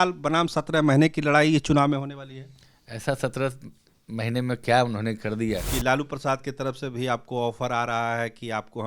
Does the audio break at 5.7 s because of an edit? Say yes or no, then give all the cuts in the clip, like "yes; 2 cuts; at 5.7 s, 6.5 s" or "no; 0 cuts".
yes; 1 cut; at 5.7 s